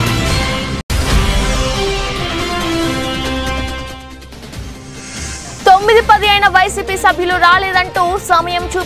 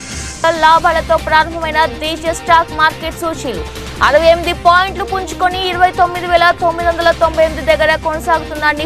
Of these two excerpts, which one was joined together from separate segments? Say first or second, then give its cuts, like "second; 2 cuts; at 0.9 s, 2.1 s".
first; 1 cut; at 5.4 s